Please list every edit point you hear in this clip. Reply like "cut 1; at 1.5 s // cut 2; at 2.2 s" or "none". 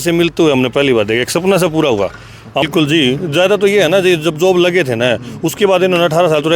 cut 1; at 2.6 s